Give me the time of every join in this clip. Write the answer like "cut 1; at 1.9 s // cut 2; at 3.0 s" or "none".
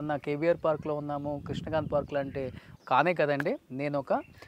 cut 1; at 2.7 s

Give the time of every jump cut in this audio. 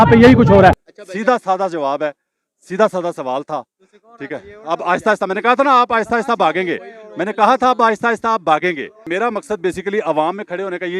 cut 1; at 0.8 s // cut 2; at 9.0 s

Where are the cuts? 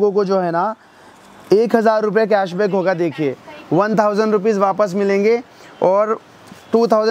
none

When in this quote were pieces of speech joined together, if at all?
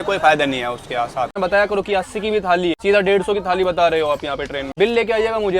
cut 1; at 1.4 s // cut 2; at 2.8 s // cut 3; at 4.6 s

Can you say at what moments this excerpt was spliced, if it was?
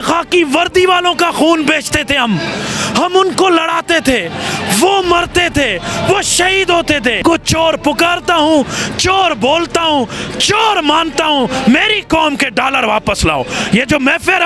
cut 1; at 7.2 s

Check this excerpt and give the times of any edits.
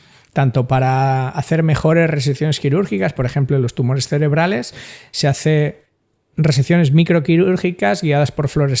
none

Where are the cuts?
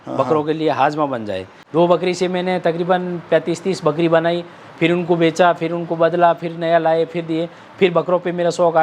cut 1; at 1.5 s

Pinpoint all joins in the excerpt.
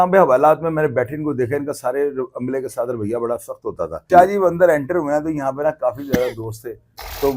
cut 1; at 4.0 s

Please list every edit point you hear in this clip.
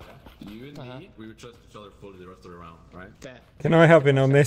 cut 1; at 3.6 s

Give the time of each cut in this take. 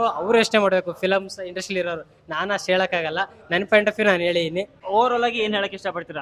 none

